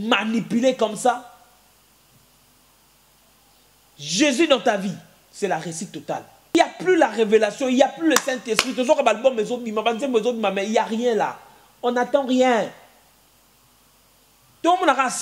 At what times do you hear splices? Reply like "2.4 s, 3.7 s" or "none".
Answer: 6.5 s